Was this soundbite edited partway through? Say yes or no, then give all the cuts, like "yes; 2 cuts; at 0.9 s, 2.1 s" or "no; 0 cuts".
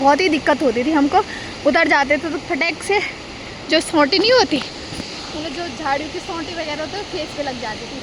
no; 0 cuts